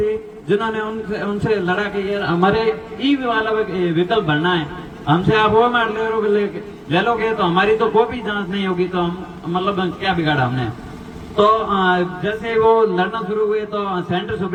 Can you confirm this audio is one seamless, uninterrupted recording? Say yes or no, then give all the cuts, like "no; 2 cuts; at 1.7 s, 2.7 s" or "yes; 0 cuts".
yes; 0 cuts